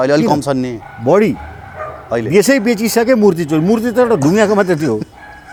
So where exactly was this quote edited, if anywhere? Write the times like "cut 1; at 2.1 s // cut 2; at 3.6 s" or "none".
none